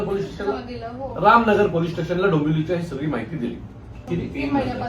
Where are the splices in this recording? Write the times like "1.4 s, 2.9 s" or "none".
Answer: 4.0 s